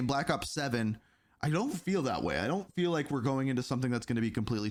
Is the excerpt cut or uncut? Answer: uncut